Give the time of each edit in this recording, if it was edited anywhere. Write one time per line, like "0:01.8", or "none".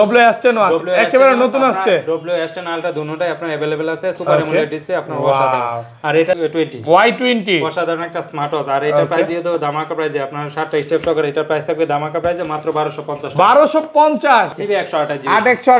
0:06.4
0:14.5